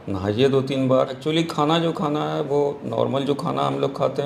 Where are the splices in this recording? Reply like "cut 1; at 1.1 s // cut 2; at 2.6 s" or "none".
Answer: cut 1; at 1.2 s